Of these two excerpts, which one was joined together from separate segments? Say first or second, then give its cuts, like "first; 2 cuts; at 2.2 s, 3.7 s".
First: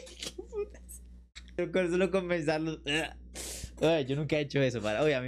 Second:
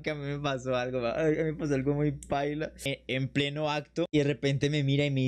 second; 2 cuts; at 2.7 s, 4.1 s